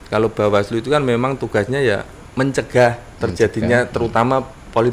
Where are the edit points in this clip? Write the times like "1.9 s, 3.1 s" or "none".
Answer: 2.2 s